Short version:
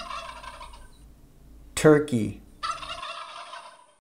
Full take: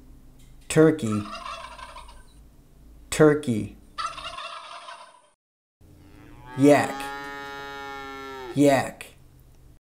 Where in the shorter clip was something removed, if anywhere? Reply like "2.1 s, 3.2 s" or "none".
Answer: none